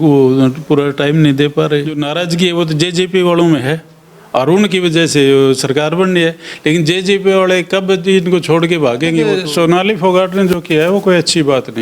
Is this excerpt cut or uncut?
cut